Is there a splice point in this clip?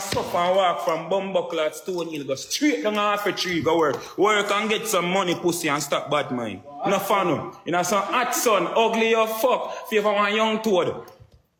no; 0 cuts

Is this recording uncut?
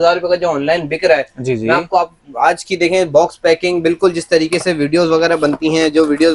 yes; 0 cuts

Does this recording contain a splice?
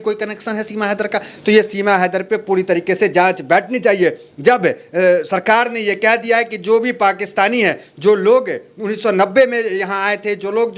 no; 0 cuts

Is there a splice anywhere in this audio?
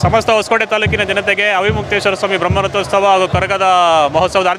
no; 0 cuts

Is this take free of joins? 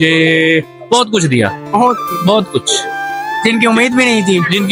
yes; 0 cuts

